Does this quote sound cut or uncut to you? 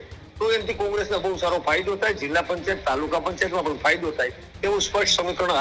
uncut